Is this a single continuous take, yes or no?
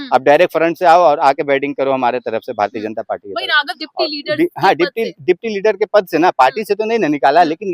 no